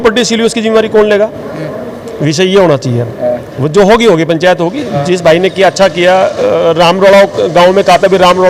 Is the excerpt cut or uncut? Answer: uncut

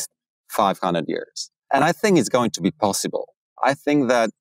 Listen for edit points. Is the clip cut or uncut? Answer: cut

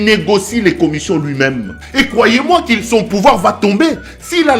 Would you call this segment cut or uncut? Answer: cut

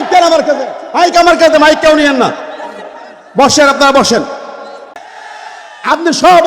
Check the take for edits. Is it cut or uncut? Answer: cut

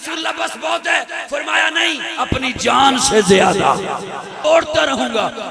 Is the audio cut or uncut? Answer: cut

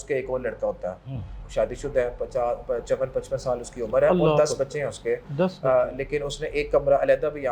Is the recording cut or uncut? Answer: cut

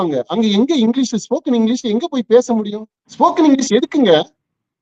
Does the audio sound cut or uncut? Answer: cut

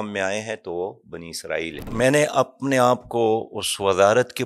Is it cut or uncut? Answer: cut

